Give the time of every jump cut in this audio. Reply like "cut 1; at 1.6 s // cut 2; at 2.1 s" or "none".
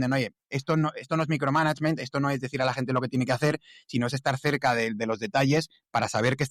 none